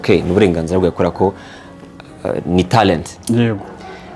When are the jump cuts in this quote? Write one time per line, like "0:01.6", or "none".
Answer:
none